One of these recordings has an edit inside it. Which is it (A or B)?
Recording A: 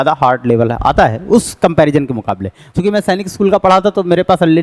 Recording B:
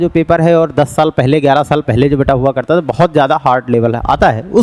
A